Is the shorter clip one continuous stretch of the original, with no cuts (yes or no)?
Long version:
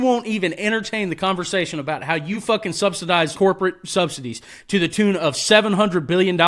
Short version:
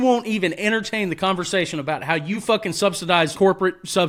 yes